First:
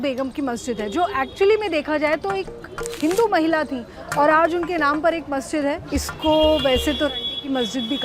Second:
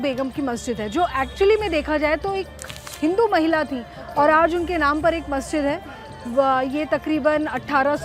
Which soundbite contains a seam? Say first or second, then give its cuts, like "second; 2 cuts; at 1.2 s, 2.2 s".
first; 1 cut; at 5.8 s